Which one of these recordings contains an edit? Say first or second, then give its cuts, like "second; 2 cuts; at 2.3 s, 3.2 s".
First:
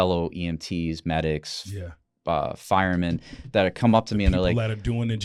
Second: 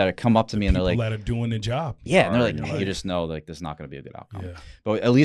second; 1 cut; at 2.6 s